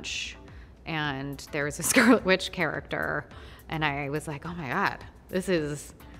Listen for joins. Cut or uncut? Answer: uncut